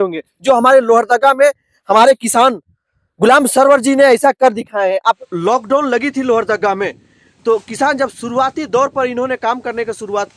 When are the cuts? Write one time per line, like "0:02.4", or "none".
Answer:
0:05.2